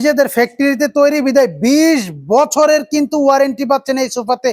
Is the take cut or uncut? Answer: uncut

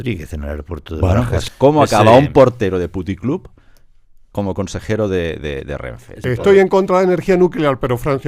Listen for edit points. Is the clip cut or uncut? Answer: cut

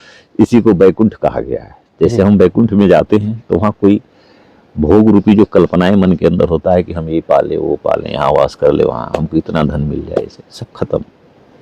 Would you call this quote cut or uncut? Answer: uncut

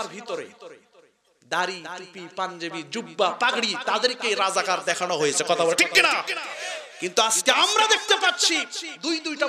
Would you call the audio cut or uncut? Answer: uncut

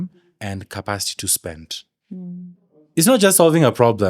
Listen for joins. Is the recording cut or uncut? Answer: uncut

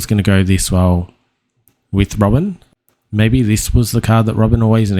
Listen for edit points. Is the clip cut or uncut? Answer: cut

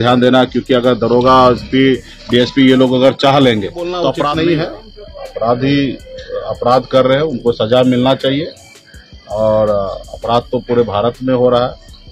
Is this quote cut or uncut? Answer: cut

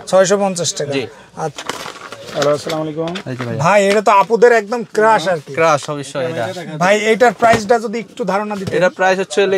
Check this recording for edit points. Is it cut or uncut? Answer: cut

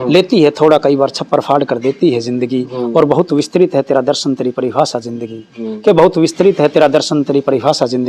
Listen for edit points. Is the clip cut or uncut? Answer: uncut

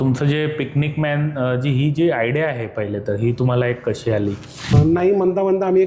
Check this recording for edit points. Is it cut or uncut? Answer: cut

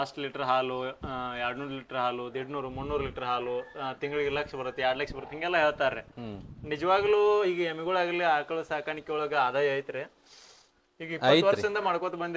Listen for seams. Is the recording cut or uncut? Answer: uncut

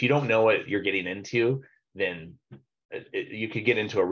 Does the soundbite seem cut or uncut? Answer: uncut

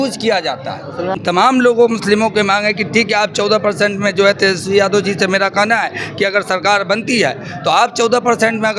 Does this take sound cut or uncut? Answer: cut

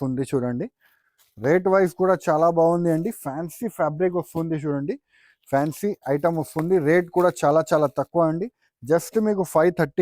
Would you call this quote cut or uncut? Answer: uncut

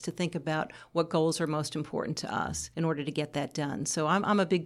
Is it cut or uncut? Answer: cut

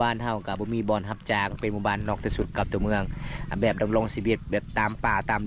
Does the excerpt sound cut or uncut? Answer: uncut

